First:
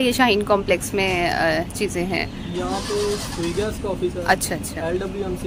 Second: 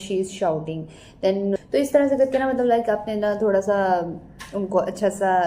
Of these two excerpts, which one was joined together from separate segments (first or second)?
second